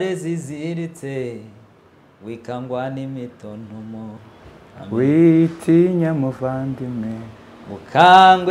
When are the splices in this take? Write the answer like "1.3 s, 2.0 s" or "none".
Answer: none